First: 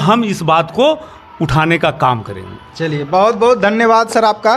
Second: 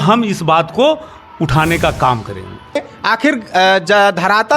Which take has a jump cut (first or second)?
second